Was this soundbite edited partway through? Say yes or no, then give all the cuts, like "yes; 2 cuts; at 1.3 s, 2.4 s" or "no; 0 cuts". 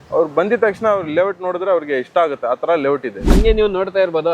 yes; 1 cut; at 3.3 s